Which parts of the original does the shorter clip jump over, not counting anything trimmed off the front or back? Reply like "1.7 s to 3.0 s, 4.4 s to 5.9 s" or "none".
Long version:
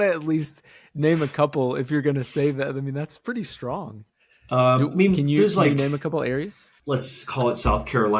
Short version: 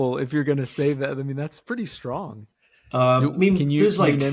none